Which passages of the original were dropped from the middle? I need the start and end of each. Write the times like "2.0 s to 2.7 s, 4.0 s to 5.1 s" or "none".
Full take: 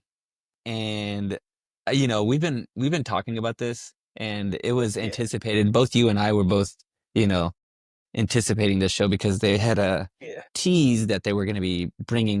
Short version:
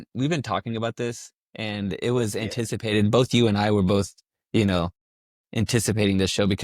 none

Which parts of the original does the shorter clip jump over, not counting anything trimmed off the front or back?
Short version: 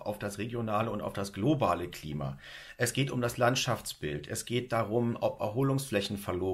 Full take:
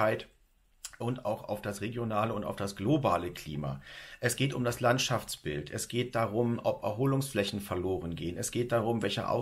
none

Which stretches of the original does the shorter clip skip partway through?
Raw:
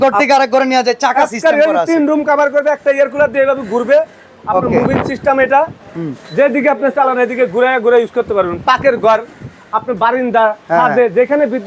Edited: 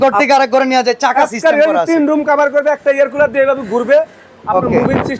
none

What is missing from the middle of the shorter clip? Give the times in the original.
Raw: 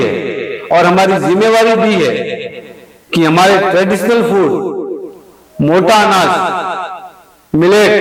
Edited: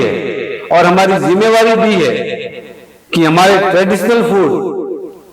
none

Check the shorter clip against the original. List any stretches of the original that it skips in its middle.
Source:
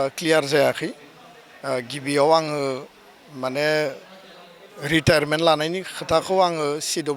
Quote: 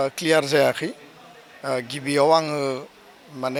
none

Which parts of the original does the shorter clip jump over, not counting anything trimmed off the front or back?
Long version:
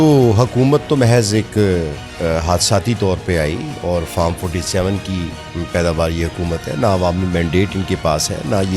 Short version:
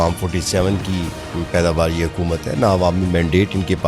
none

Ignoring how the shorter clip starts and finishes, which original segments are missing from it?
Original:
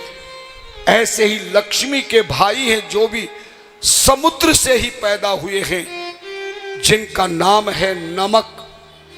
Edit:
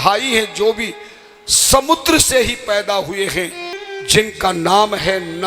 6.1 s to 6.5 s

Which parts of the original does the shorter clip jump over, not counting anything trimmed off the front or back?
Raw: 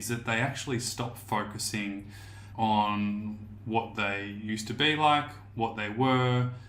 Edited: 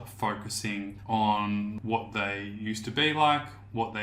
2.1 s to 2.5 s, 3.3 s to 3.6 s

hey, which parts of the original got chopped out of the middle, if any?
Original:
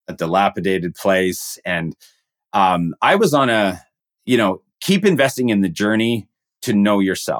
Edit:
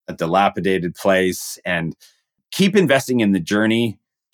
2.4 s to 4.7 s

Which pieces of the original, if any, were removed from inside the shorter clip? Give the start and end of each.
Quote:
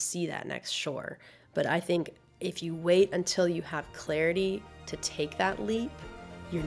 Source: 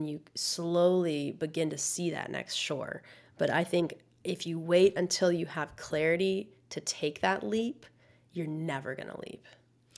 none

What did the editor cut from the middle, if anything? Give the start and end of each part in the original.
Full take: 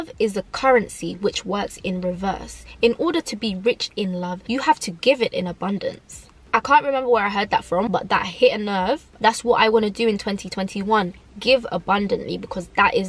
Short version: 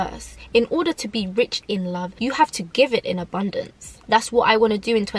6.2 s to 9.1 s

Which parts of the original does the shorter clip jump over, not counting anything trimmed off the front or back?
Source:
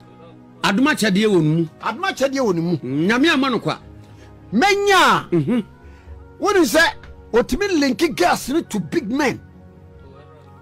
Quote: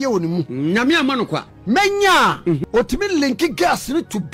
3.8 s to 4.3 s, 5.5 s to 7.2 s

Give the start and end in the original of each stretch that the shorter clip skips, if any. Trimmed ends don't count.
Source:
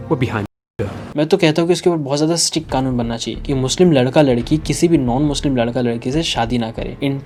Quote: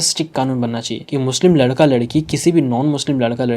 none

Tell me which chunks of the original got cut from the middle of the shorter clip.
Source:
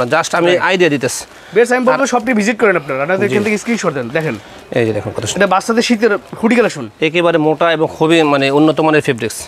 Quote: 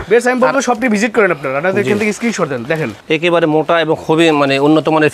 4.4 s to 6.9 s

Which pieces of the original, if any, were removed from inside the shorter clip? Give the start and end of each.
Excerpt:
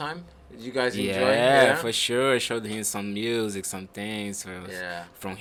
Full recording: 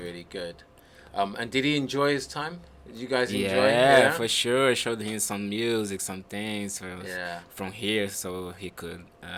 none

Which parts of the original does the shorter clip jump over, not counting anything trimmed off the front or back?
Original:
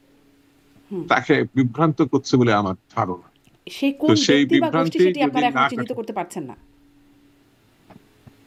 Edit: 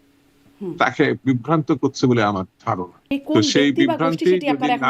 3.2 s to 3.7 s

